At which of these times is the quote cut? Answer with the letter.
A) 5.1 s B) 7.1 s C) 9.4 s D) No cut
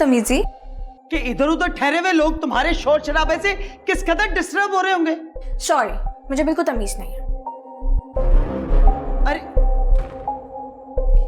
D